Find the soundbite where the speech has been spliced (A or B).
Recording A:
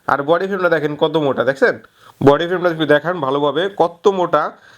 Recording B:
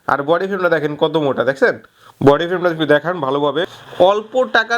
B